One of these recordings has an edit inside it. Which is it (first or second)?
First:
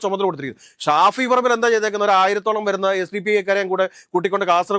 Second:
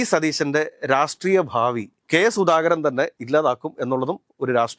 second